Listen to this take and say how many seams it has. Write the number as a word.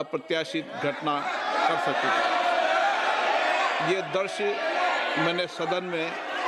zero